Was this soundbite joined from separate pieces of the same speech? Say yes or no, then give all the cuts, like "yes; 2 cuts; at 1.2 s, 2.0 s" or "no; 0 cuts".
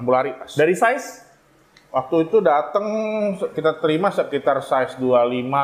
no; 0 cuts